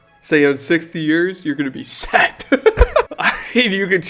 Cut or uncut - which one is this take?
cut